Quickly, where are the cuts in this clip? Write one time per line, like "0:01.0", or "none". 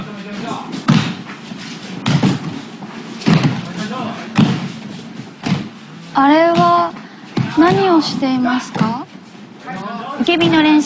none